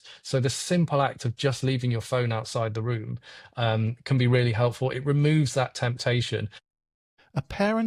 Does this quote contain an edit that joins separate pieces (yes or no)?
yes